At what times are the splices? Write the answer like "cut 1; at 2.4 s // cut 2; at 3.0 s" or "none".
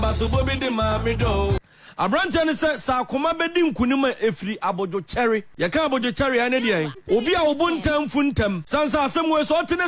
cut 1; at 1.6 s // cut 2; at 5.5 s // cut 3; at 7.0 s // cut 4; at 8.6 s